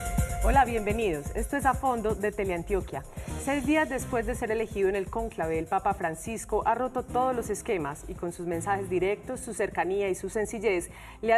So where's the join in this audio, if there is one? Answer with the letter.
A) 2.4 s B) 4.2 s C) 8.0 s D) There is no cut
D